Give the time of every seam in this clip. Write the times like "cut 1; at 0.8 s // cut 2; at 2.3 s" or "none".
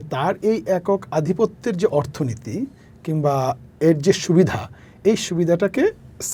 none